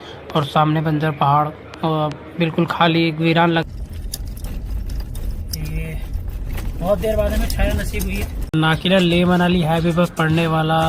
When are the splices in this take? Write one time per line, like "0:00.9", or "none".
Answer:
0:03.6
0:08.5